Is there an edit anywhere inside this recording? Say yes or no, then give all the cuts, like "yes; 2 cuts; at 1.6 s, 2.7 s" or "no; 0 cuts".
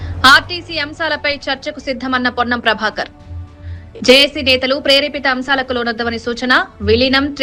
no; 0 cuts